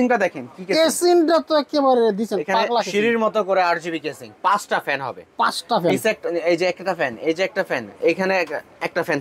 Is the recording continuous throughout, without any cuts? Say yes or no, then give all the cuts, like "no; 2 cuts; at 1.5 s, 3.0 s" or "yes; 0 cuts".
yes; 0 cuts